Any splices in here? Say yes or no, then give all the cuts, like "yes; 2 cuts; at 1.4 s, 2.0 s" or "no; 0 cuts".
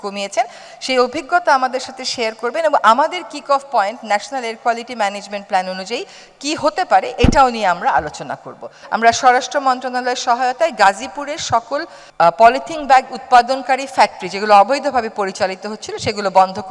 yes; 2 cuts; at 8.8 s, 12.0 s